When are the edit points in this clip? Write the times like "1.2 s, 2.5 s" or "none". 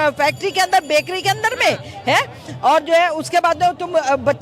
none